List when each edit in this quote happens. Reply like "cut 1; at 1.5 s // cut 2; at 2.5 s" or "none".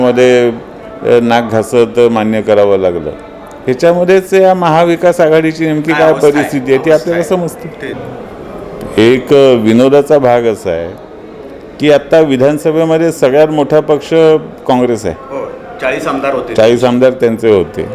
cut 1; at 8.1 s